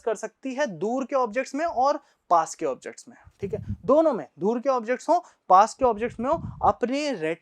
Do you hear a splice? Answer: no; 0 cuts

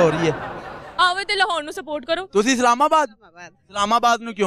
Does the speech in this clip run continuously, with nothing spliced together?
no; 1 cut; at 2.2 s

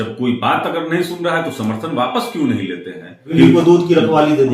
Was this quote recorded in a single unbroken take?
no; 1 cut; at 3.3 s

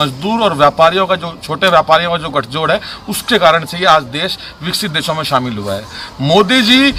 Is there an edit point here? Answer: no; 0 cuts

